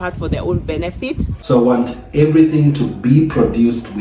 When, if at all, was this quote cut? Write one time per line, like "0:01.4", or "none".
0:01.3